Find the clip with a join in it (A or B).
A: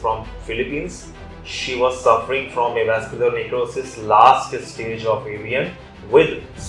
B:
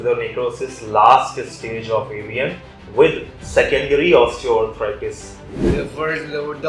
B